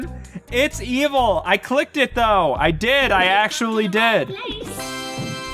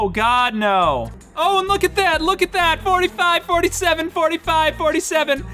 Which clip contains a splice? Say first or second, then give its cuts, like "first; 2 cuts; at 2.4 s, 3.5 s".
second; 1 cut; at 1.2 s